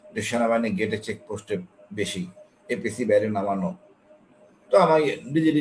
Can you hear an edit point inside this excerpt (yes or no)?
no